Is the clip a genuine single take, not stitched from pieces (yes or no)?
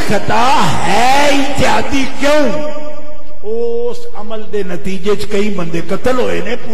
yes